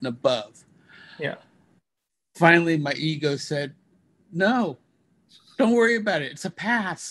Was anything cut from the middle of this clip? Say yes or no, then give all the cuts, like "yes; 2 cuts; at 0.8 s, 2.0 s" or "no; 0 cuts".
no; 0 cuts